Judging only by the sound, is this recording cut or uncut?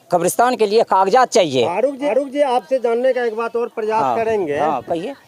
uncut